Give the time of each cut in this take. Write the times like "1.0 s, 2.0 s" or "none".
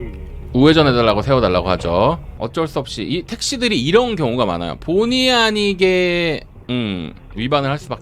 2.4 s